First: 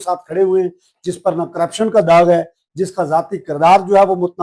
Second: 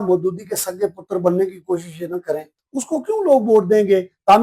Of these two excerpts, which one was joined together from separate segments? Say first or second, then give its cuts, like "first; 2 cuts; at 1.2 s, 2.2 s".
second; 1 cut; at 2.4 s